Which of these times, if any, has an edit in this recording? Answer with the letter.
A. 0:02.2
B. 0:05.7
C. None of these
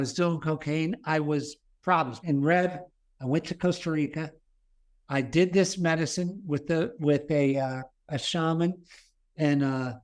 A